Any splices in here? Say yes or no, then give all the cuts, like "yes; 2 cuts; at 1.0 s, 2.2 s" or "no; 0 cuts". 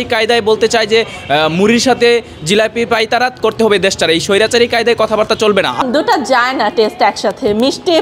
yes; 1 cut; at 5.8 s